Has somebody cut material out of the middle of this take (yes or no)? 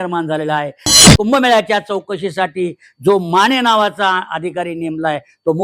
yes